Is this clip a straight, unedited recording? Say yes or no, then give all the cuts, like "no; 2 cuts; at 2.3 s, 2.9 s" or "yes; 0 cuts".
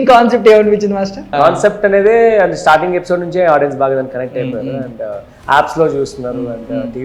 no; 1 cut; at 1.3 s